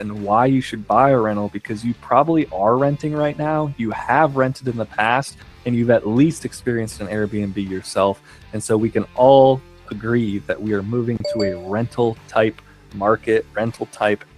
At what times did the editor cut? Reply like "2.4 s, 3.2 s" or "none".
none